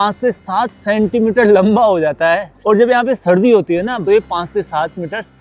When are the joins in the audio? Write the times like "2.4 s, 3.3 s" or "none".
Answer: none